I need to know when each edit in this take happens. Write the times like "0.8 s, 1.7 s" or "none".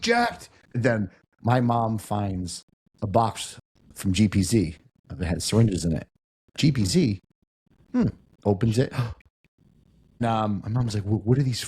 0.7 s, 10.2 s